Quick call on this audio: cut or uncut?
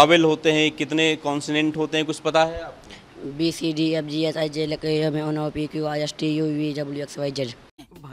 uncut